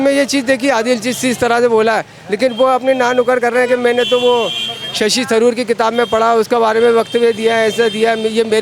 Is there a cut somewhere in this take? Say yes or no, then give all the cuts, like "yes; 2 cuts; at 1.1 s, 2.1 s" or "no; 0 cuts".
no; 0 cuts